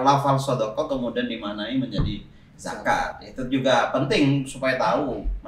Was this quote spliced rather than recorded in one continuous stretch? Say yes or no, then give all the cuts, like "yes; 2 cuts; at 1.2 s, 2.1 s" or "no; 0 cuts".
no; 0 cuts